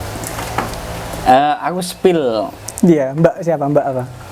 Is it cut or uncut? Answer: uncut